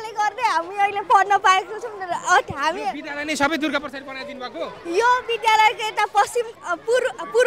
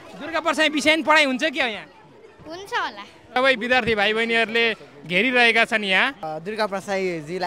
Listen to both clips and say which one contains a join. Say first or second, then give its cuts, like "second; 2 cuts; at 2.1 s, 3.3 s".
second; 2 cuts; at 3.4 s, 6.3 s